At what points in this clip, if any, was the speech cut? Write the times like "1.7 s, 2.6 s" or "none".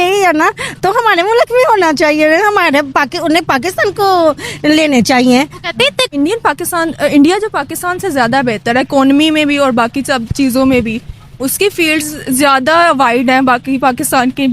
6.1 s